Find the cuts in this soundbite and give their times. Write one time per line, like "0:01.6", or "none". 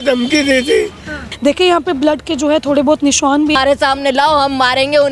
0:01.3
0:03.6